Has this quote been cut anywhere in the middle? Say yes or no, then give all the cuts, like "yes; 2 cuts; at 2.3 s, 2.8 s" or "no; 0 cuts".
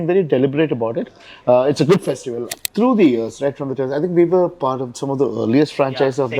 yes; 1 cut; at 2.6 s